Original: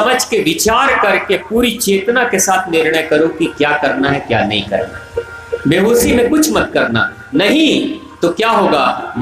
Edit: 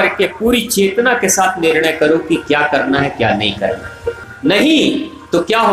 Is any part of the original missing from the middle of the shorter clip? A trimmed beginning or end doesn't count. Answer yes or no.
yes